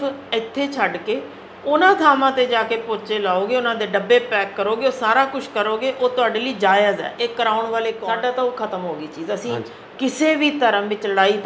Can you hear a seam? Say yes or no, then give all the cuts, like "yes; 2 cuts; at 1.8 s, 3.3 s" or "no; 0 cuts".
yes; 1 cut; at 8.0 s